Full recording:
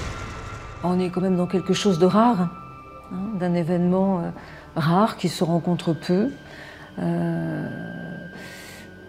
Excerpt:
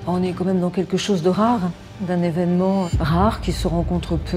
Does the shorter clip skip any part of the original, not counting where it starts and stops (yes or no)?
yes